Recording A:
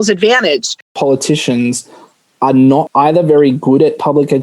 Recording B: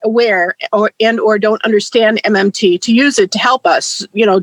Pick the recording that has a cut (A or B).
A